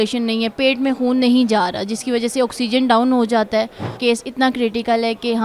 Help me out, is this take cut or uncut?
cut